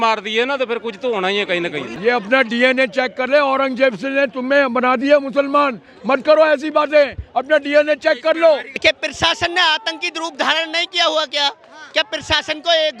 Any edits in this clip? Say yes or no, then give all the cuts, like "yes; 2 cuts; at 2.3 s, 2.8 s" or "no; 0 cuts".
yes; 2 cuts; at 1.8 s, 8.8 s